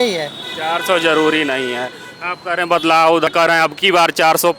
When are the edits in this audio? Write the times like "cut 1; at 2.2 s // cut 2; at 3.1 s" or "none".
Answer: cut 1; at 1.9 s // cut 2; at 3.3 s